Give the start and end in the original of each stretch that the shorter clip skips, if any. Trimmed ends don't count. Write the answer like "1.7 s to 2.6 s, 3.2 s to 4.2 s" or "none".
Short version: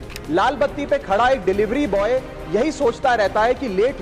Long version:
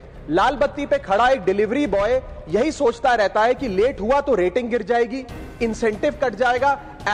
none

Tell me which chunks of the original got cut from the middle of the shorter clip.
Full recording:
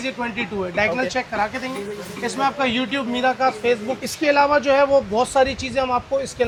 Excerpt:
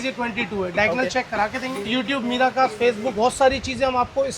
1.9 s to 2.7 s, 4.0 s to 5.1 s

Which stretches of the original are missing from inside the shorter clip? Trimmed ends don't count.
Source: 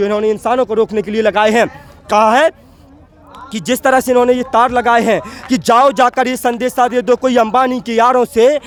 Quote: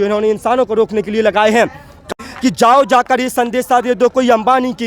2.1 s to 5.2 s

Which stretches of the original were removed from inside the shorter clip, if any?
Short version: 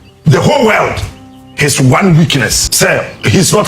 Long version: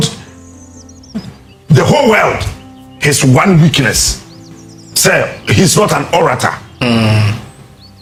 4.1 s to 4.9 s

